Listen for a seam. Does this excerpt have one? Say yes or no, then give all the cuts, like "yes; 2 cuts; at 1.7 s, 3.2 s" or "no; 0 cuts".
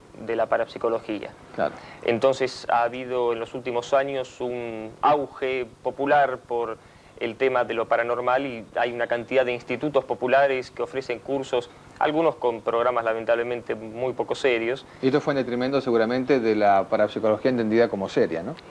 no; 0 cuts